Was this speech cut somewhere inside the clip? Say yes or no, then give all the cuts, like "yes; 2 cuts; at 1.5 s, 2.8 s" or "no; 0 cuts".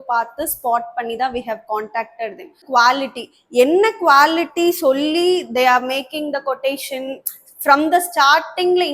yes; 1 cut; at 2.6 s